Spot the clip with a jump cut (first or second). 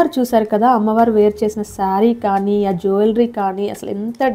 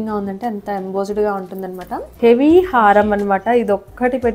second